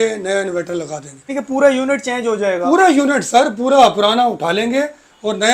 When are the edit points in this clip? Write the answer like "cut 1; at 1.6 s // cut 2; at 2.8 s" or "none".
cut 1; at 1.3 s